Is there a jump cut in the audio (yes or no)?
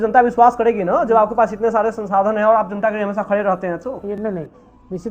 no